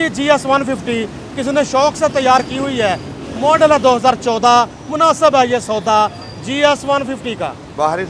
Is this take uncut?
yes; 0 cuts

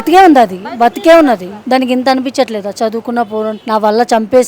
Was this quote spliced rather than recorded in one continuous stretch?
yes; 2 cuts; at 1.5 s, 3.6 s

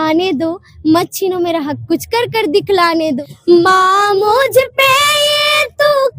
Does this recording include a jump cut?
yes; 1 cut; at 3.3 s

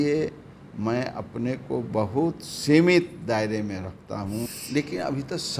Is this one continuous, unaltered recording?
no; 1 cut; at 4.5 s

